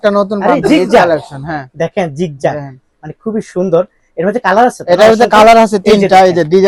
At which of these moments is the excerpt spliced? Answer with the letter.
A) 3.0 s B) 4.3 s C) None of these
C